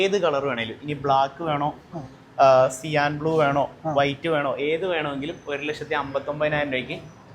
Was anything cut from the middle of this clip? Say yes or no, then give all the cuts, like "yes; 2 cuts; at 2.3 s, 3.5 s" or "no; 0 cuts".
no; 0 cuts